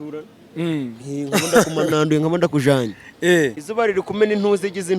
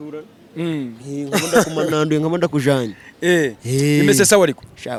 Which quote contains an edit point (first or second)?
first